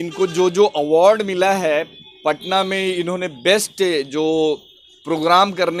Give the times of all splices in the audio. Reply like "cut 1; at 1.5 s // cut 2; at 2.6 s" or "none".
none